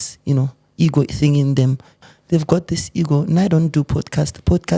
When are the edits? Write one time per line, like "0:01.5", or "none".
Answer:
0:01.9